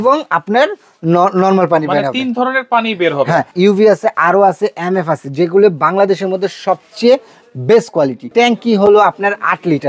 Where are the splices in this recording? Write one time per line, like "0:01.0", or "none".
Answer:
0:03.5
0:08.2